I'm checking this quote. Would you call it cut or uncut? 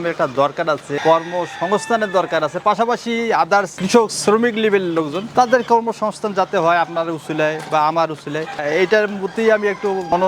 cut